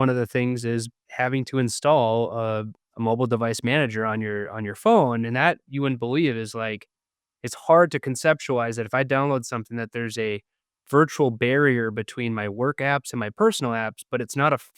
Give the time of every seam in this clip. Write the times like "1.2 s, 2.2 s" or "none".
1.0 s, 2.8 s

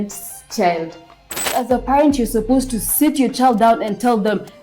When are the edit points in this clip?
1.6 s

